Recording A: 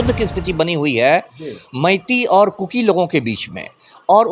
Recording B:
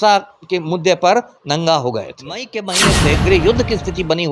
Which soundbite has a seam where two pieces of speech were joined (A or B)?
B